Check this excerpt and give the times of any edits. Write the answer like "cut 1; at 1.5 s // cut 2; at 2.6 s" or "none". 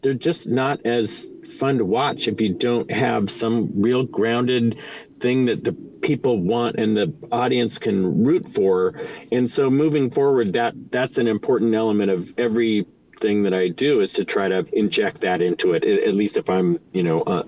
cut 1; at 10.8 s // cut 2; at 12.3 s // cut 3; at 14.7 s